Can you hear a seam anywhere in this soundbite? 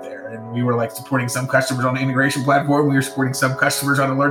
no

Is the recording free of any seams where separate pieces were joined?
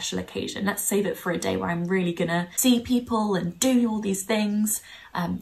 no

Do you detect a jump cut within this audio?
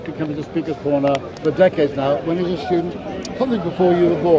yes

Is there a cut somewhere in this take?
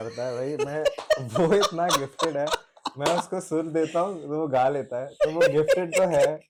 no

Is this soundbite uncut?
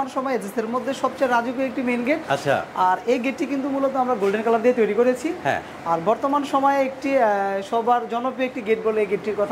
yes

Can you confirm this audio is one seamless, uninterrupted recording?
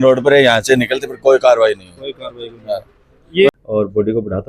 no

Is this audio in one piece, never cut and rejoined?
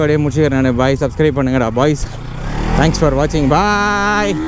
yes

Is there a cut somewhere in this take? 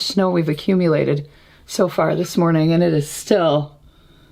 no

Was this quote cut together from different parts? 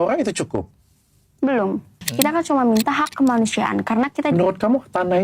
yes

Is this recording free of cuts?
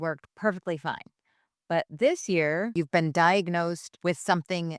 no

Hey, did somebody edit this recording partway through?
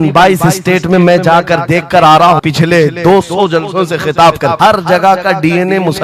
yes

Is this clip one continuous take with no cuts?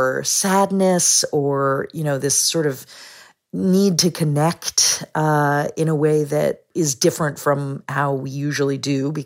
no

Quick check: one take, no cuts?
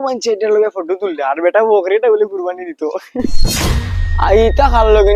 yes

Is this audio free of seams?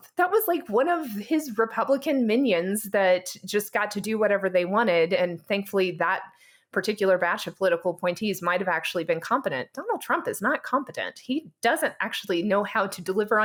yes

